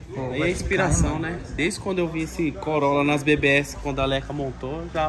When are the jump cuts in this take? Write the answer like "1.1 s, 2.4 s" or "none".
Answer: none